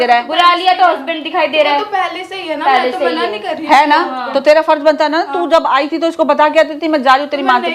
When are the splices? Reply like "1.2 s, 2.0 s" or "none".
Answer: none